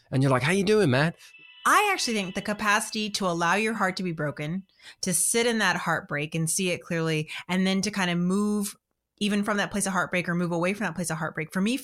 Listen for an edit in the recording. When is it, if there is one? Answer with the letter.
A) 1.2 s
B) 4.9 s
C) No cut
A